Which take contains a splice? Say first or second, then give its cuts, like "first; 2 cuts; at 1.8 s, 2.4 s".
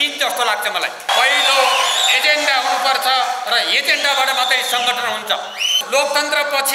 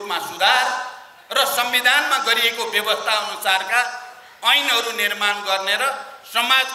first; 2 cuts; at 1.1 s, 5.8 s